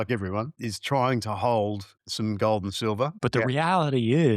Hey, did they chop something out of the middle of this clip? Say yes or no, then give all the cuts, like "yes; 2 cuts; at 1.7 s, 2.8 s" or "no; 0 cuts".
yes; 1 cut; at 3.2 s